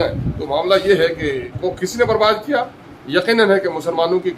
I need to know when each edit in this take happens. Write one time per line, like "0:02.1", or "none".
0:01.5